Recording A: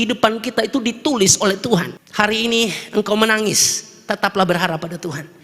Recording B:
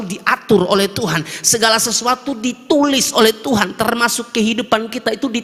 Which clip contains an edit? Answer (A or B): A